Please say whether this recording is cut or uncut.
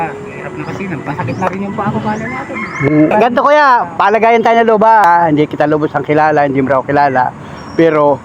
cut